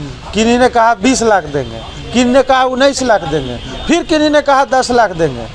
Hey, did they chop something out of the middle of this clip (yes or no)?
no